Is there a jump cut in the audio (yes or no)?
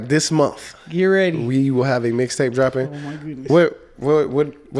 no